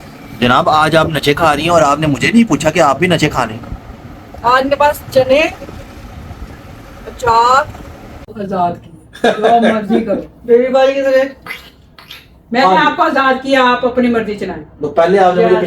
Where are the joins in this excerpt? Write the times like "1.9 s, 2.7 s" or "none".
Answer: 8.4 s